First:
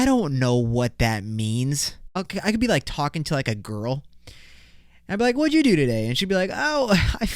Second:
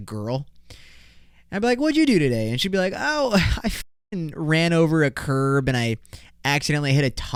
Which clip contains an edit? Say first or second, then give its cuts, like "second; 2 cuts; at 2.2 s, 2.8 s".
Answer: first; 1 cut; at 2.1 s